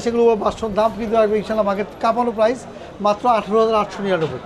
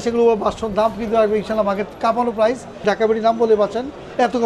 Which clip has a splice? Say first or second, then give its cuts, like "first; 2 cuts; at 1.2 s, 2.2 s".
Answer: second; 1 cut; at 2.8 s